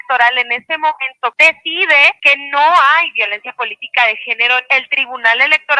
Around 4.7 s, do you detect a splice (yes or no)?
yes